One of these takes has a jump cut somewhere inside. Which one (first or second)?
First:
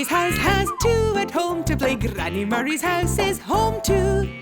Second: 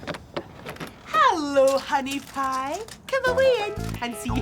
second